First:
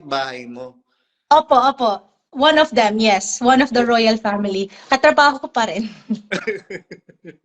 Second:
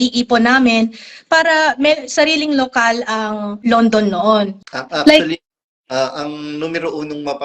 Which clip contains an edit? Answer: second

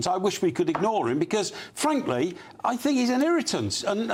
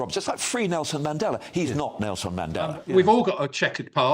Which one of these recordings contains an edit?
second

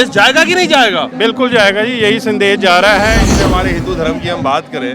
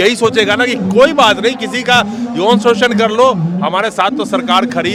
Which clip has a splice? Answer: first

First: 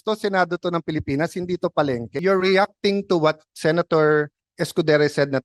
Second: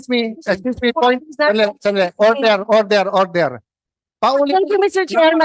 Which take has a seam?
first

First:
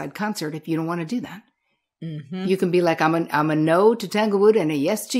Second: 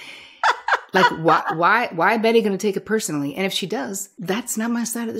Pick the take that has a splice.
second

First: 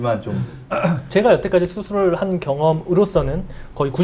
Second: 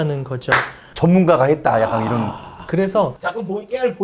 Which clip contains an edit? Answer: first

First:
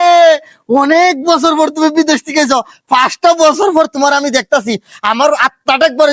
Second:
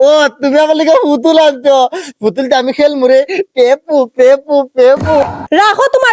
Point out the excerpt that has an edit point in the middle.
second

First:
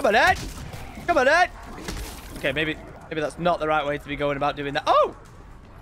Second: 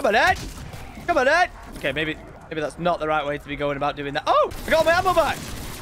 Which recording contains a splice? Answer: second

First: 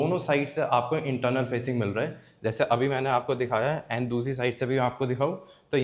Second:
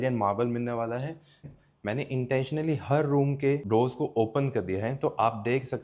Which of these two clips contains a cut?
second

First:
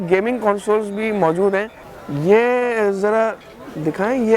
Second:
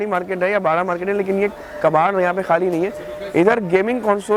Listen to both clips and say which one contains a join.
first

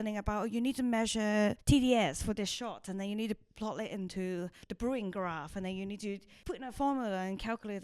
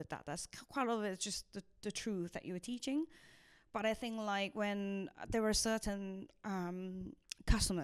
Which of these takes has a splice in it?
first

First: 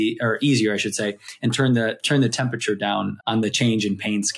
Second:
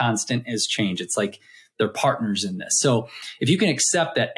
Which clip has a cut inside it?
first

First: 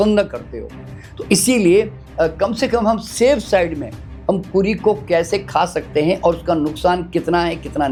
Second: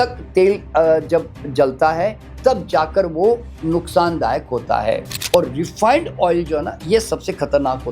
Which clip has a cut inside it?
second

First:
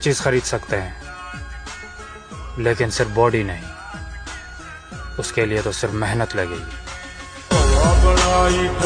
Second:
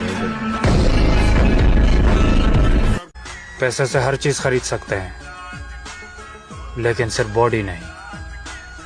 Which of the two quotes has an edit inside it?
second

